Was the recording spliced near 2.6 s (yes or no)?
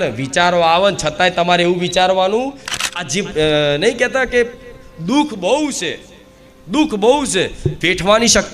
yes